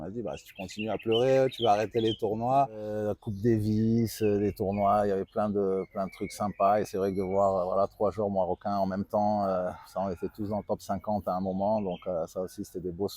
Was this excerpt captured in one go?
no; 1 cut; at 3.1 s

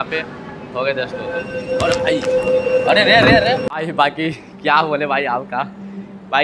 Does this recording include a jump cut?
no; 0 cuts

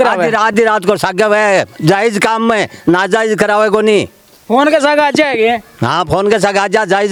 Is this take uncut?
yes; 0 cuts

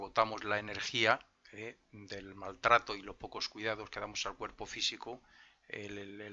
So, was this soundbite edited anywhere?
no; 0 cuts

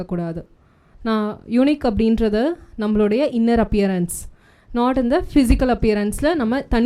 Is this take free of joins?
yes; 0 cuts

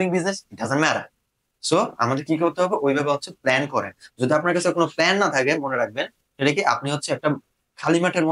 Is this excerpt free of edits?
yes; 0 cuts

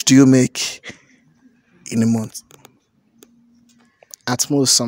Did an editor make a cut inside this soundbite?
no; 0 cuts

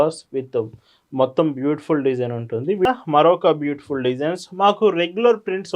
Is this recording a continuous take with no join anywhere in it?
no; 1 cut; at 2.8 s

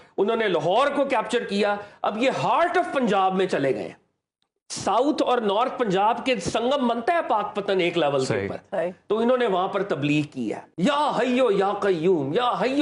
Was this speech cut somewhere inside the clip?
yes; 1 cut; at 10.6 s

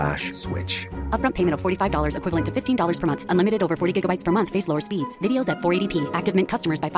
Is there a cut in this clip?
no; 0 cuts

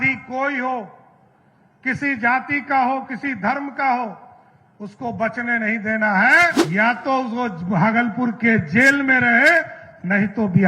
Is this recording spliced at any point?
yes; 1 cut; at 6.6 s

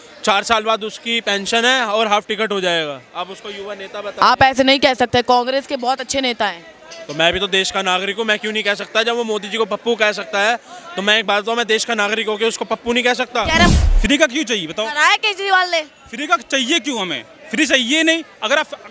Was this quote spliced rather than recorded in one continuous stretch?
yes; 1 cut; at 13.7 s

